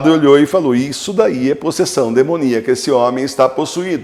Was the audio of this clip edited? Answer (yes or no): no